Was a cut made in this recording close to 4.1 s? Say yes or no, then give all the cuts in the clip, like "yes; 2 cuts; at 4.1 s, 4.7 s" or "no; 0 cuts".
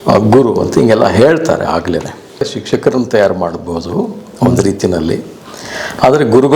no; 1 cut; at 2.4 s